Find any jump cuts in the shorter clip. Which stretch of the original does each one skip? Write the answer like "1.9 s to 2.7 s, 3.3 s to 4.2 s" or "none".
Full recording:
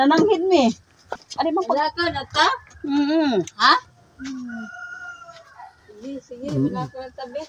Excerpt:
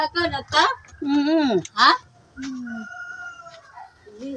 none

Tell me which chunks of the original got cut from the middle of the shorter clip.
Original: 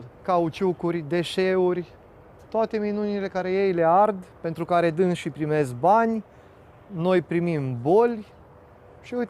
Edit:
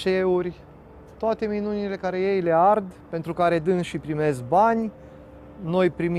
none

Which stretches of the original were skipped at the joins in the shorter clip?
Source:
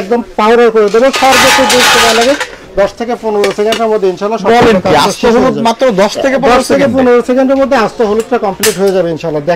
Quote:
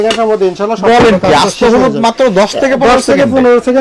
none

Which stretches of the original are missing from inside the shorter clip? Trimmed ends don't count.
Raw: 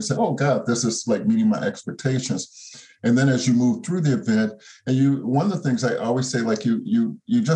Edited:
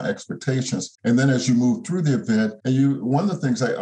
2.5 s to 2.9 s, 4.6 s to 4.8 s

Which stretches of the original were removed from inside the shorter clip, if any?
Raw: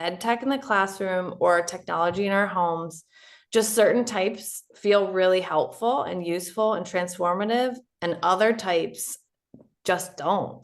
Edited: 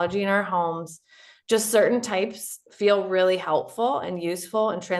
none

